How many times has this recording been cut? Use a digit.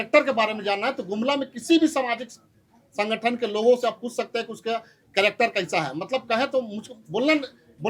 0